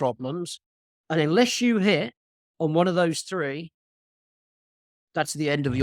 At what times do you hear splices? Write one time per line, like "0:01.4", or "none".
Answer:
none